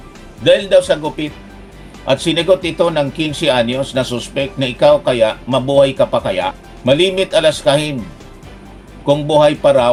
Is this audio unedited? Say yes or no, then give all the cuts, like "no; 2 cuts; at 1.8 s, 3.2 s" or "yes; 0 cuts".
yes; 0 cuts